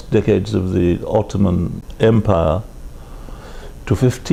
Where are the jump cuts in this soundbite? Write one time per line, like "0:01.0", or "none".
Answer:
none